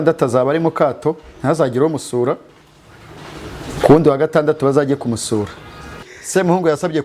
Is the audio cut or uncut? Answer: cut